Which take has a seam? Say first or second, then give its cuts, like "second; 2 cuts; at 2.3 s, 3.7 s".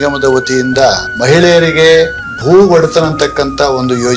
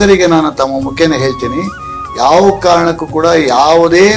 first; 2 cuts; at 1.1 s, 2.3 s